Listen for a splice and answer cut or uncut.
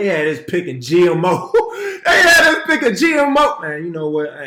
uncut